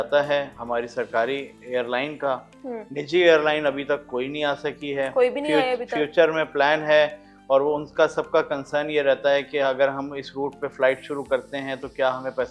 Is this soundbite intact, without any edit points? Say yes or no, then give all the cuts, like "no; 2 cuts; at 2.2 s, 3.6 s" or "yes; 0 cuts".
yes; 0 cuts